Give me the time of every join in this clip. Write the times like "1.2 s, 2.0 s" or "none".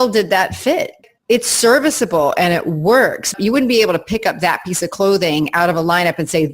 1.0 s, 3.3 s